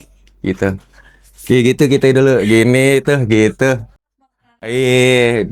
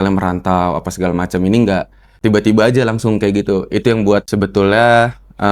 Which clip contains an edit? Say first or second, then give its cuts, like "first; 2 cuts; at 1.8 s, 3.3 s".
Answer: second; 2 cuts; at 2.0 s, 4.3 s